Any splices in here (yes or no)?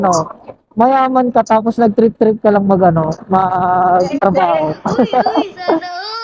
no